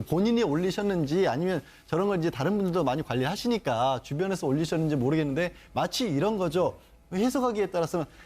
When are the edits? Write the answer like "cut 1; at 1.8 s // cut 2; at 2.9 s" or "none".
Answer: cut 1; at 6.8 s